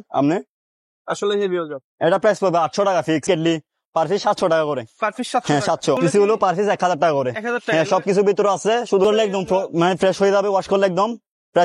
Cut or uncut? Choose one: cut